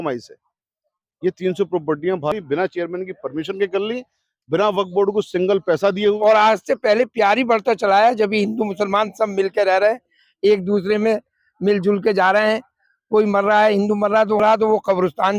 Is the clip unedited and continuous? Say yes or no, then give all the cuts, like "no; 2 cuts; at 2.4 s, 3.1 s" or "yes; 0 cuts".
no; 1 cut; at 6.2 s